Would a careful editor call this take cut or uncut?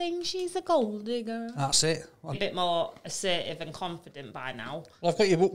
cut